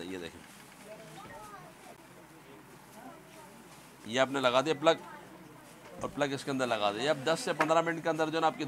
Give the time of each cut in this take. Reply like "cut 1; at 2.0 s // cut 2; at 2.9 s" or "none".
none

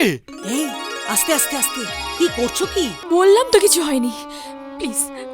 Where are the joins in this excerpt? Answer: cut 1; at 3.0 s

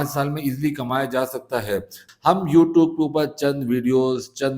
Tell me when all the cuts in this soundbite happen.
cut 1; at 2.0 s

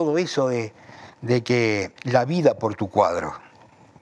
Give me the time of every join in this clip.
cut 1; at 2.0 s

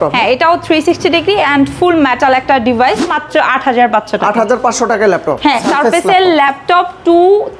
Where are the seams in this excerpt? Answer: cut 1; at 3.2 s // cut 2; at 5.7 s

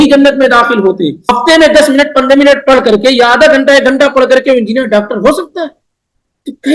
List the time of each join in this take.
cut 1; at 1.4 s

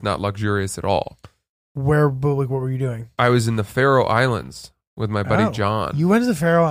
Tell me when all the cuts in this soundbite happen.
none

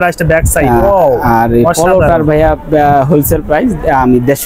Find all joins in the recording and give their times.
none

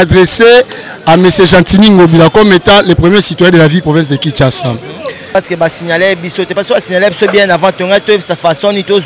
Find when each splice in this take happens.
cut 1; at 5.4 s

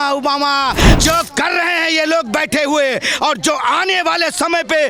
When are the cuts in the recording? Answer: cut 1; at 0.9 s

